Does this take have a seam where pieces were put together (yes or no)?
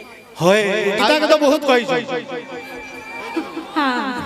yes